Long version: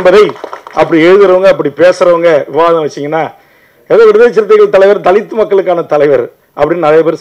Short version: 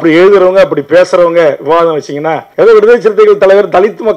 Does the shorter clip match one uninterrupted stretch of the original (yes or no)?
no